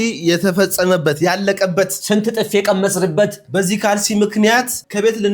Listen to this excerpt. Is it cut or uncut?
uncut